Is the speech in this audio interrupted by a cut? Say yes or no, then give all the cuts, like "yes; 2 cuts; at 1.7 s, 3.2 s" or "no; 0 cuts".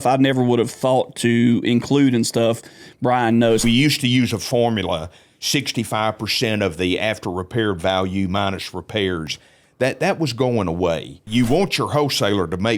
yes; 2 cuts; at 3.6 s, 11.2 s